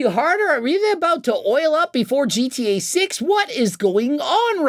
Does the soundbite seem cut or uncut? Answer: uncut